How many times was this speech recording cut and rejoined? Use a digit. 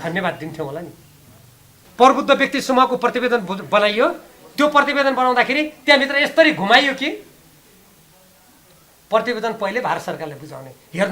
1